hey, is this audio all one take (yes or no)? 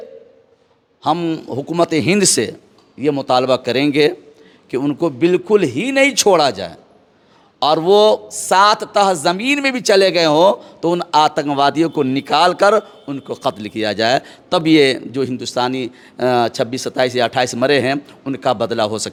yes